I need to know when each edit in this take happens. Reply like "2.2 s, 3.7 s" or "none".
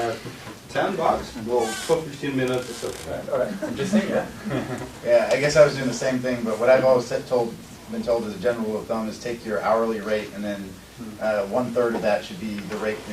3.0 s

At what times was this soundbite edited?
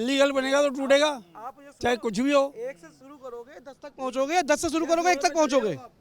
none

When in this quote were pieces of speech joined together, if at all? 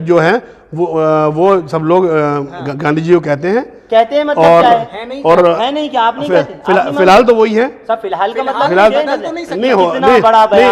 none

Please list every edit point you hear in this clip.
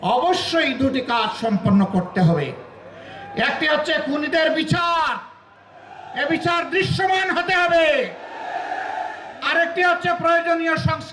none

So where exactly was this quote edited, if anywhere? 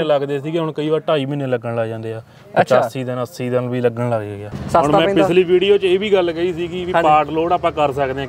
4.5 s

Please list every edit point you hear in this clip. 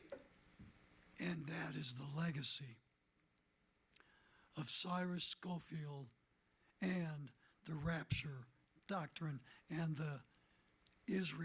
none

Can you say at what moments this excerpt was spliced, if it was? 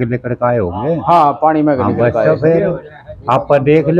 none

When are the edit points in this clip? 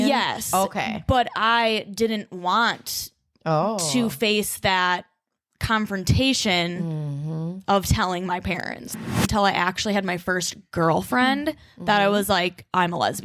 9.0 s

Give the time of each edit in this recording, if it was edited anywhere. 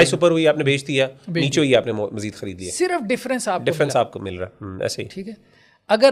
none

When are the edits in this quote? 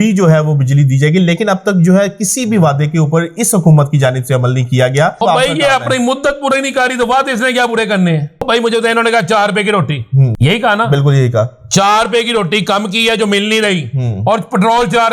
5.2 s, 8.4 s, 10.3 s

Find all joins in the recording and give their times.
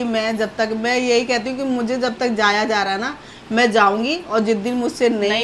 none

